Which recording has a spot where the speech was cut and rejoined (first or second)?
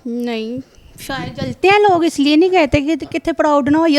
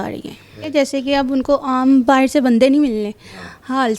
second